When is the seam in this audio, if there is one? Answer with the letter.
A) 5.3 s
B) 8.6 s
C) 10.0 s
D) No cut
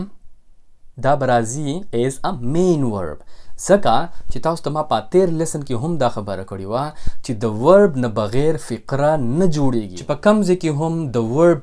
C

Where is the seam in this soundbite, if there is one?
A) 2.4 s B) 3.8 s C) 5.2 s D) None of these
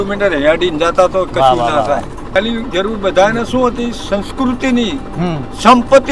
A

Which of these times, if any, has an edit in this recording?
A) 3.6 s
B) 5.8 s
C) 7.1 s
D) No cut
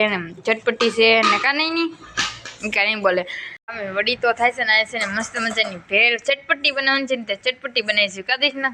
A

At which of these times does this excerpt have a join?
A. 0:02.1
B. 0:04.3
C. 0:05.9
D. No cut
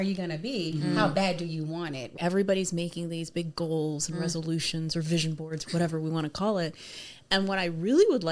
A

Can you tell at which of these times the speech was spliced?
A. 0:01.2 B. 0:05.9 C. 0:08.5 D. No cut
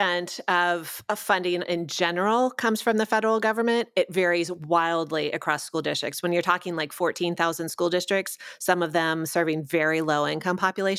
D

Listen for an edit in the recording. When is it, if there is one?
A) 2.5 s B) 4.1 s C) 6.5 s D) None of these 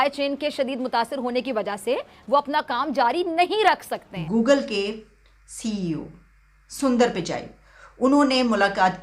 B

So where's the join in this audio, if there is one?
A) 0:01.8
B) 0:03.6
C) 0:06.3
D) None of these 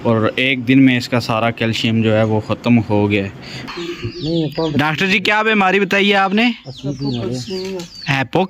B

